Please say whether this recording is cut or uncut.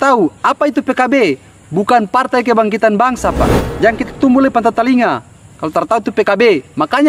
cut